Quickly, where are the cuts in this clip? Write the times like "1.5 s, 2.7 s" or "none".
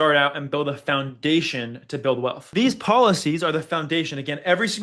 2.4 s